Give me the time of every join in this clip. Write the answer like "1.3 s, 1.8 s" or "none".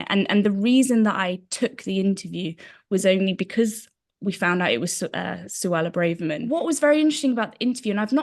6.4 s